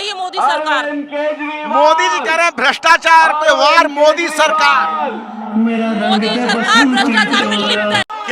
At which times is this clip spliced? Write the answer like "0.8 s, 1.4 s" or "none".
none